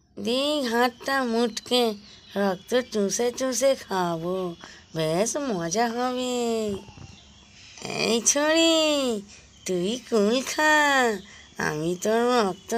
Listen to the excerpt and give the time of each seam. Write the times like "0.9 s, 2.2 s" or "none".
none